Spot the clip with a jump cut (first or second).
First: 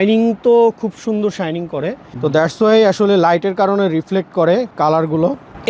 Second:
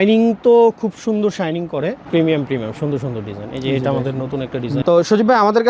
second